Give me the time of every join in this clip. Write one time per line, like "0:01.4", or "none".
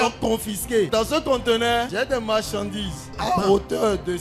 0:00.9
0:01.9
0:03.1